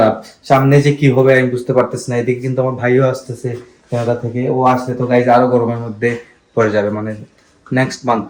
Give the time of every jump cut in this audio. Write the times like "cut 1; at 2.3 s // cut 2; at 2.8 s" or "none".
none